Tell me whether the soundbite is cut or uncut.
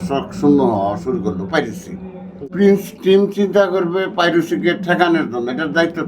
cut